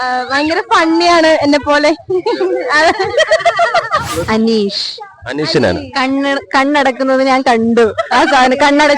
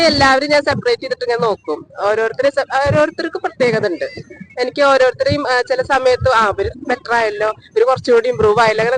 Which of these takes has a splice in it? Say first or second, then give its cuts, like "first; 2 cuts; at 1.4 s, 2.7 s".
first; 1 cut; at 4.2 s